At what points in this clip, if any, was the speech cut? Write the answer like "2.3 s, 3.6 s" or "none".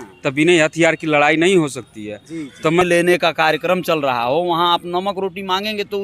2.8 s